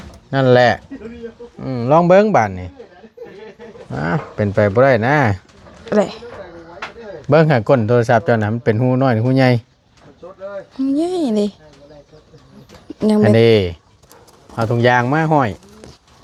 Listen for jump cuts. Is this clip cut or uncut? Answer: uncut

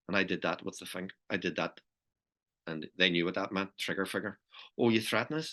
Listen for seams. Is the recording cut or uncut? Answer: uncut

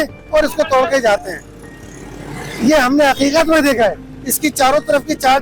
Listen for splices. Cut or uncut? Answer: uncut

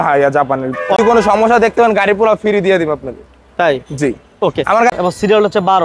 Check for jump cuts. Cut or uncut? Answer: cut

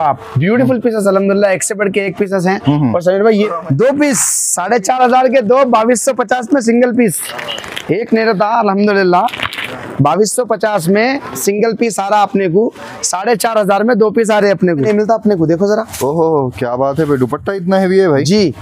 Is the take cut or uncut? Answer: cut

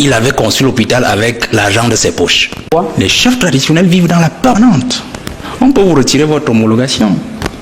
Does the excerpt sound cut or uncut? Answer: cut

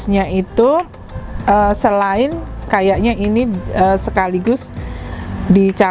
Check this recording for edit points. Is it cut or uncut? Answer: uncut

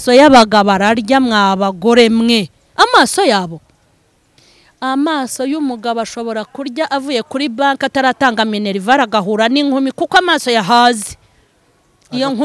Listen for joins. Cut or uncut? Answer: uncut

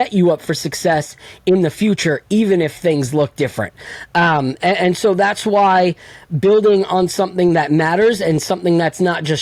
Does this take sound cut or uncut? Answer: uncut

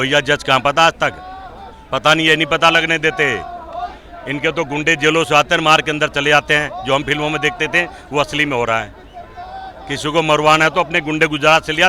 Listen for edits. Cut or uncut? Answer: uncut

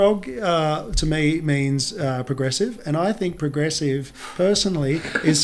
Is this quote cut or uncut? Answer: uncut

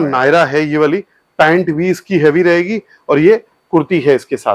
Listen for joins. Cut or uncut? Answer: uncut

